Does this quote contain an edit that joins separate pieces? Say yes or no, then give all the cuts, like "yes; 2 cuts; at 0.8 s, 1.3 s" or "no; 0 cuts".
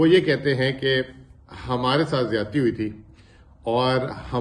no; 0 cuts